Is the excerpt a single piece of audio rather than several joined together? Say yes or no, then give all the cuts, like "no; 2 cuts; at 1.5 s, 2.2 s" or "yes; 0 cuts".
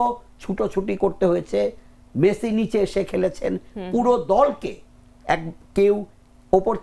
yes; 0 cuts